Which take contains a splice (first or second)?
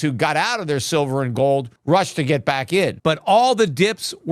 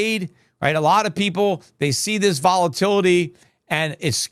first